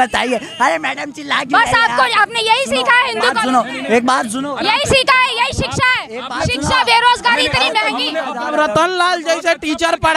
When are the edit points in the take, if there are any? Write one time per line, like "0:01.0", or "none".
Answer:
0:08.4